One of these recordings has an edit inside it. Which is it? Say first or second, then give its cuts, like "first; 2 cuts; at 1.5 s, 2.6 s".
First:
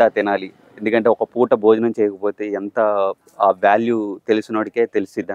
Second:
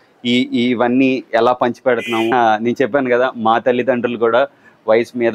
second; 1 cut; at 2.3 s